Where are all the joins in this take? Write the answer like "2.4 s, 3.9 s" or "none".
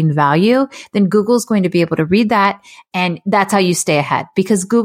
none